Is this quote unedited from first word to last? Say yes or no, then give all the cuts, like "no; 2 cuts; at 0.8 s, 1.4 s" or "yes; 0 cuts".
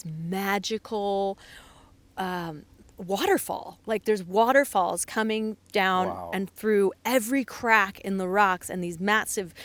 yes; 0 cuts